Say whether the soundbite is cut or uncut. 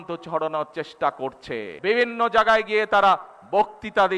cut